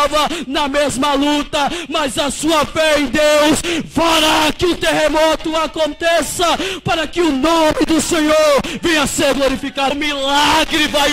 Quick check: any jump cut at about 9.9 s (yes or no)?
yes